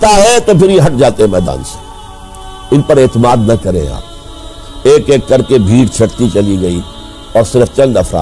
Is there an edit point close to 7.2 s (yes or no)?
no